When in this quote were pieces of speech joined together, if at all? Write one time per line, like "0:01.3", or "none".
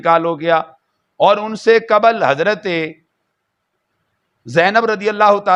none